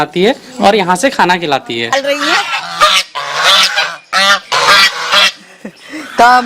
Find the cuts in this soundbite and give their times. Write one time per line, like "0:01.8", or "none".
0:01.9